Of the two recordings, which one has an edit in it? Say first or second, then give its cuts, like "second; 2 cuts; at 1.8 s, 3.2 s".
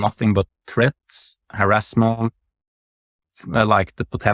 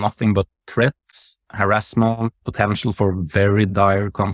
second; 1 cut; at 2.4 s